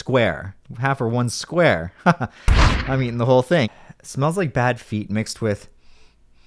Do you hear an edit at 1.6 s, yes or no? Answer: no